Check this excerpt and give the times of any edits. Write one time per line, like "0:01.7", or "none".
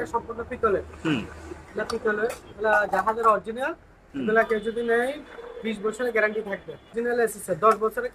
0:06.9